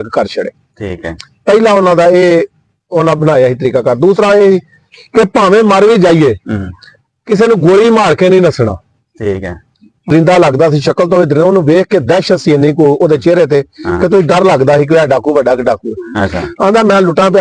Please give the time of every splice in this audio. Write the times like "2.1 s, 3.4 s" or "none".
10.0 s